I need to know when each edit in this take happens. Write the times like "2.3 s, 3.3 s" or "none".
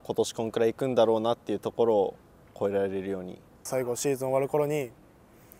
3.7 s